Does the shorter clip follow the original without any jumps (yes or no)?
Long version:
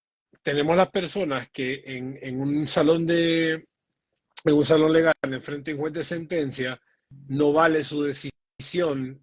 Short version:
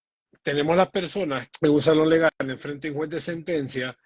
no